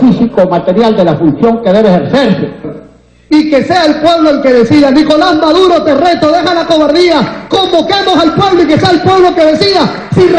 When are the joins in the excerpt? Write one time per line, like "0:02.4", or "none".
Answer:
0:01.1